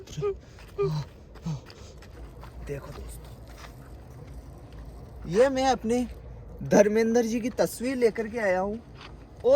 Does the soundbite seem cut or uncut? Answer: cut